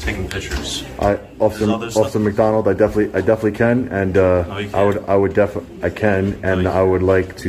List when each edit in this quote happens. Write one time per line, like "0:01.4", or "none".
none